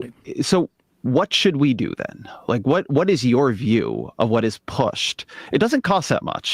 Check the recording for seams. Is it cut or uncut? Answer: uncut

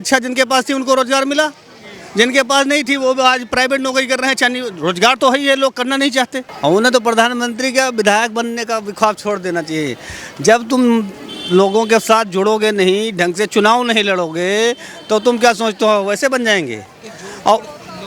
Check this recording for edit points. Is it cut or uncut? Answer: cut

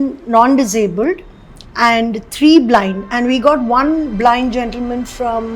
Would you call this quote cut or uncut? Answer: uncut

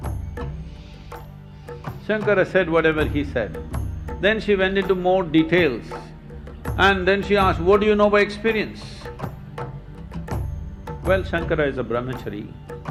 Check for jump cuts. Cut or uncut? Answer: uncut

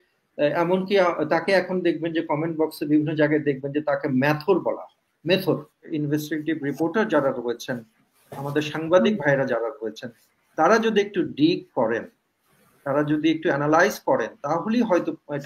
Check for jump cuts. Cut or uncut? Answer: cut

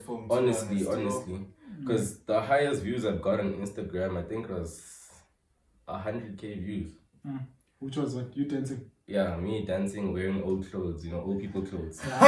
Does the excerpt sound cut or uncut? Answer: uncut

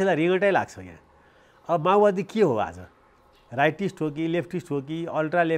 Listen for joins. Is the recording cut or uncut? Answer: uncut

